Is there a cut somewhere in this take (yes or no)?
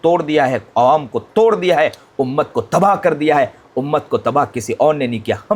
no